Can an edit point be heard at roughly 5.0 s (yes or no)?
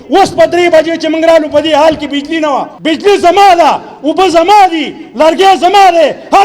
no